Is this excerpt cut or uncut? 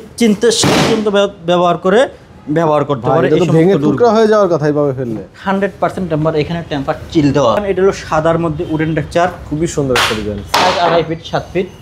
cut